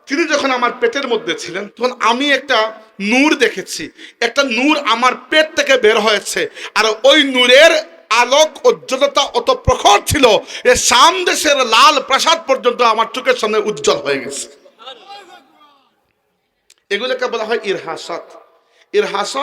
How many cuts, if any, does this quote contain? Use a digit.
1